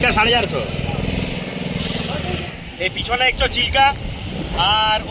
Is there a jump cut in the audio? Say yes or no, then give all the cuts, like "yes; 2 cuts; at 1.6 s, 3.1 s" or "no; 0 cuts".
yes; 1 cut; at 2.5 s